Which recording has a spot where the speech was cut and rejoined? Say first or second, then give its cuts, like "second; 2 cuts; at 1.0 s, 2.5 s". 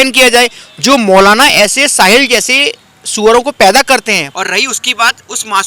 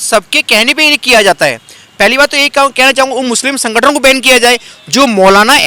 first; 1 cut; at 4.3 s